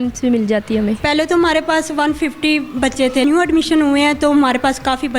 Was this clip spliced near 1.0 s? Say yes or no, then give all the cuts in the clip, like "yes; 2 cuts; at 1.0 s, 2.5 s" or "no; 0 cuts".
yes; 2 cuts; at 1.0 s, 3.2 s